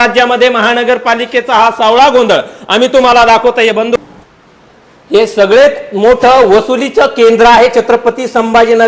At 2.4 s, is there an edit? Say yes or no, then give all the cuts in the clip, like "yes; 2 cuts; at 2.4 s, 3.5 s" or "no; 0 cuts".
no; 1 cut; at 4.0 s